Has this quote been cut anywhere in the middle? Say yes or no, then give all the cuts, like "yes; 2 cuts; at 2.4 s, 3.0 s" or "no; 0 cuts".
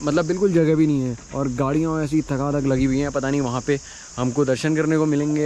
no; 0 cuts